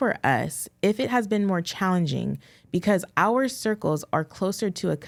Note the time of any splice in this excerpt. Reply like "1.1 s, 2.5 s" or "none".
none